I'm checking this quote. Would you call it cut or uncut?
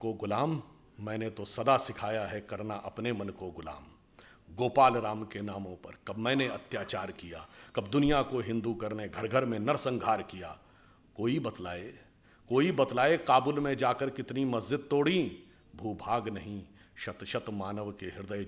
uncut